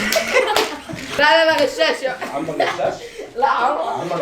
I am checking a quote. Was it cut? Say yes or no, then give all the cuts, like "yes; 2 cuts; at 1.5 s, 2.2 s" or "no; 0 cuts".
yes; 1 cut; at 1.2 s